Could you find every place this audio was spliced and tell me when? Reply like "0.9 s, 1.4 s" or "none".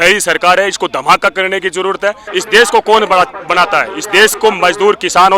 2.2 s